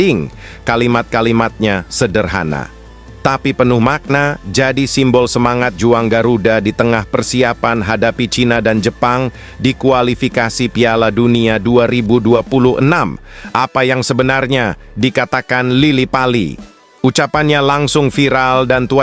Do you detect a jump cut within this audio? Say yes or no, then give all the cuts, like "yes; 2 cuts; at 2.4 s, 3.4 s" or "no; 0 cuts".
no; 0 cuts